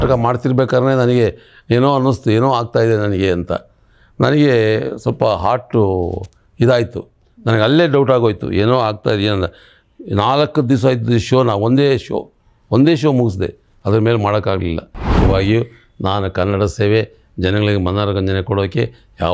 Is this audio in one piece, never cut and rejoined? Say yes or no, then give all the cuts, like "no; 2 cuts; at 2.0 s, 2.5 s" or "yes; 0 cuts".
no; 1 cut; at 15.0 s